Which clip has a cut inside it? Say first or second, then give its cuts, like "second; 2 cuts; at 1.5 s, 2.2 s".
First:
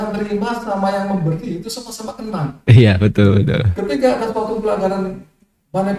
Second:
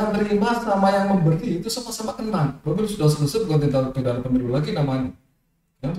second; 1 cut; at 2.6 s